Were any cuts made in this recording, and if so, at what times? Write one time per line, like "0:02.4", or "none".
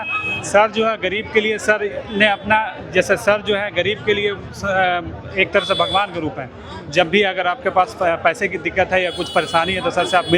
none

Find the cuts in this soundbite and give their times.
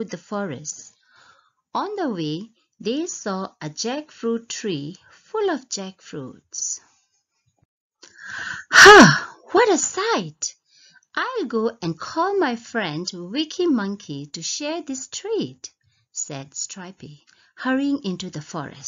0:12.7

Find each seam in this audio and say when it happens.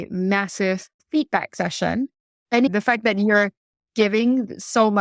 0:01.0
0:02.7

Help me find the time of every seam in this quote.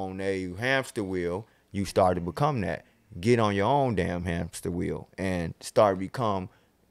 none

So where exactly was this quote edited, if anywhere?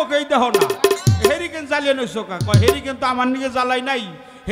none

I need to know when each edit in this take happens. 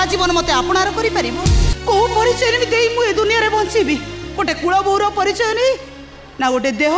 0:01.7

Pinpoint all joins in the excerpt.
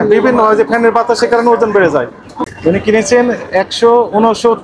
0:02.5

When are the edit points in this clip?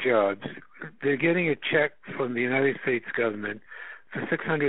none

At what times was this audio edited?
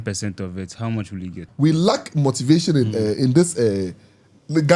0:01.3

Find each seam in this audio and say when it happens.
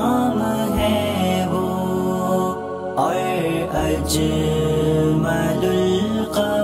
none

